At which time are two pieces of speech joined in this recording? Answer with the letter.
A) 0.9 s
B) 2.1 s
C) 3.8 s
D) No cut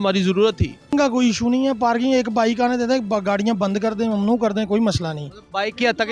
A